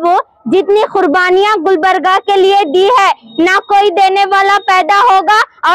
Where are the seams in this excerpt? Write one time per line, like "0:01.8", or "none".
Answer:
none